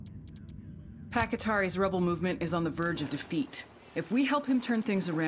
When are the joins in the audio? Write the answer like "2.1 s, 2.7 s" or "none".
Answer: 1.1 s